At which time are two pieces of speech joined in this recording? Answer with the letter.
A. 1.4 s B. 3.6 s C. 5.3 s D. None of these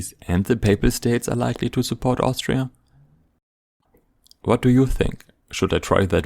B